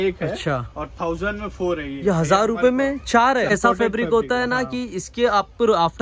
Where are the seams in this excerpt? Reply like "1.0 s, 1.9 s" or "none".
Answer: 3.5 s